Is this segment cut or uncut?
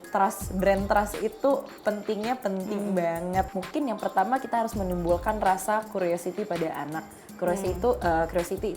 cut